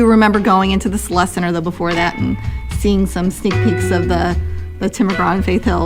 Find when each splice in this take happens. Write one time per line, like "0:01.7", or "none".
none